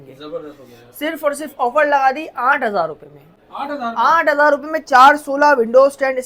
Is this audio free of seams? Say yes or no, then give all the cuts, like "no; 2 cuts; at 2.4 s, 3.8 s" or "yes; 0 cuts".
yes; 0 cuts